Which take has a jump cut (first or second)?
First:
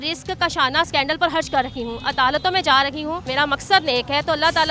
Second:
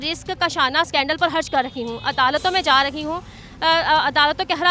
first